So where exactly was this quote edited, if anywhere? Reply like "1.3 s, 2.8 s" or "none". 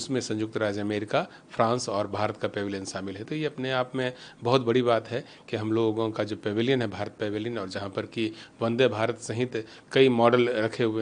none